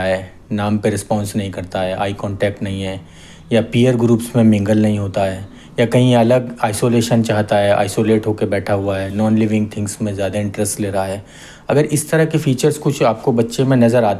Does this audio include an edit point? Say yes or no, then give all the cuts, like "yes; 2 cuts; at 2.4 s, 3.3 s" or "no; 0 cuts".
no; 0 cuts